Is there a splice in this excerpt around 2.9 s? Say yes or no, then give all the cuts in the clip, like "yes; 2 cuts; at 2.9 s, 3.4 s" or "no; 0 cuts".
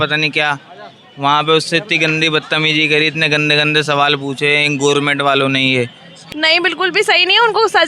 no; 1 cut; at 6.2 s